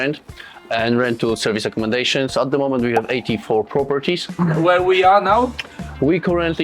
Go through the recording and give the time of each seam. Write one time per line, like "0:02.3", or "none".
0:04.4